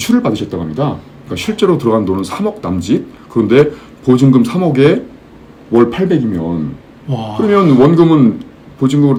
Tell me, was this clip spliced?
no; 0 cuts

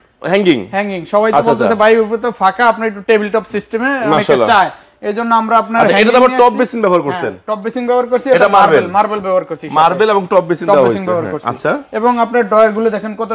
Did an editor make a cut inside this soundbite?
no; 0 cuts

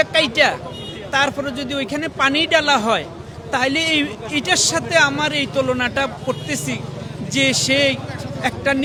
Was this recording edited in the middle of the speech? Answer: no; 0 cuts

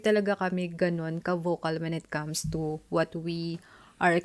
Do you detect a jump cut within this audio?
no; 0 cuts

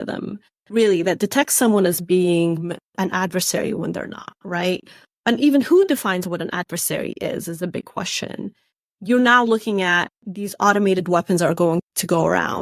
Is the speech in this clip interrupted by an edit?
no; 0 cuts

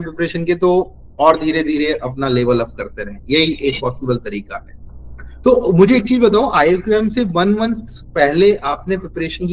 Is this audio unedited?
yes; 0 cuts

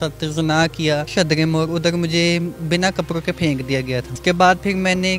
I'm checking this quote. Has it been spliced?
yes; 2 cuts; at 1.1 s, 4.1 s

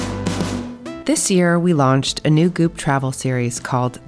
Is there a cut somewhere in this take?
yes; 1 cut; at 1.0 s

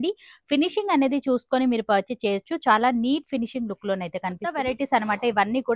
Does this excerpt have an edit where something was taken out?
yes; 1 cut; at 4.6 s

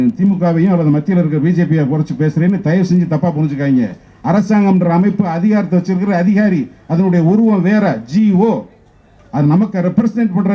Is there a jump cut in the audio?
no; 0 cuts

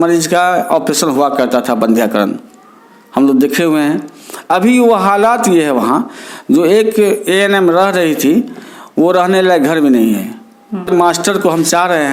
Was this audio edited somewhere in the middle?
yes; 1 cut; at 10.9 s

